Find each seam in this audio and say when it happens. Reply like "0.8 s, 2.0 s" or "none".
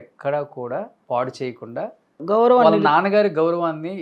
1.0 s, 2.2 s